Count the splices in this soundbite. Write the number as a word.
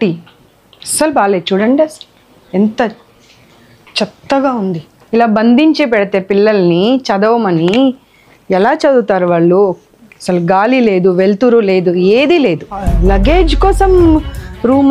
two